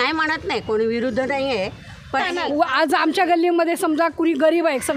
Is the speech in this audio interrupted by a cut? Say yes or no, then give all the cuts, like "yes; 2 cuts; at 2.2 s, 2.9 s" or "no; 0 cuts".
yes; 1 cut; at 2.2 s